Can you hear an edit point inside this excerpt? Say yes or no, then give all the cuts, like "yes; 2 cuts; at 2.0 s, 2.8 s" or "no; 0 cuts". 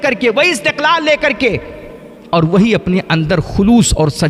no; 0 cuts